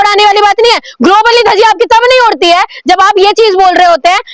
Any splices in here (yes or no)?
no